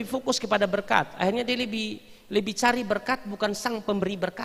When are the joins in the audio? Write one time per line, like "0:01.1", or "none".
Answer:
none

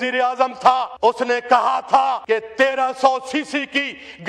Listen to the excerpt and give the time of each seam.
0:00.9
0:02.2

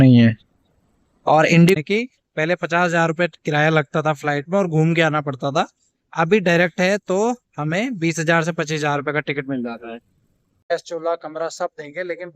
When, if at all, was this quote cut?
0:01.8
0:10.7

